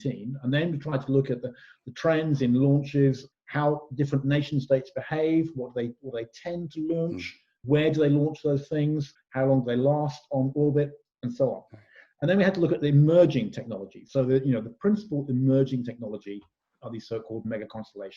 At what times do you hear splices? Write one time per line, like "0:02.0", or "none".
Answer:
0:03.3
0:07.6
0:09.2